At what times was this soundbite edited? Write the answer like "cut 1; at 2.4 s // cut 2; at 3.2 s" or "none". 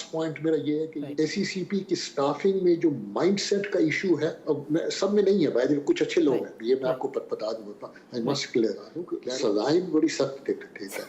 cut 1; at 0.9 s // cut 2; at 9.1 s